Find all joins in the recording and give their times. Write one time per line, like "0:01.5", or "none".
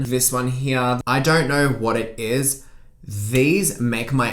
0:01.0

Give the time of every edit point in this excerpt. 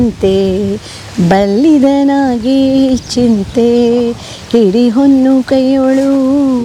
none

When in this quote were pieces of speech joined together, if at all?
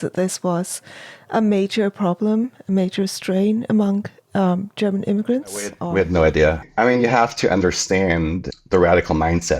0:05.8
0:06.6
0:08.5

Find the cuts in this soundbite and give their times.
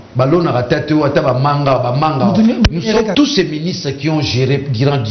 0:03.1

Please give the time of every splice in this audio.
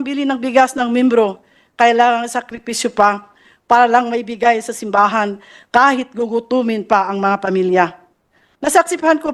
none

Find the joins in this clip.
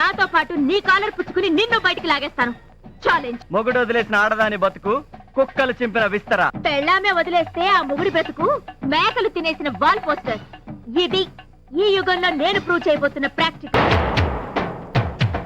0:03.4
0:06.5
0:13.7

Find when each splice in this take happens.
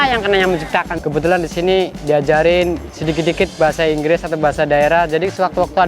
0:00.9

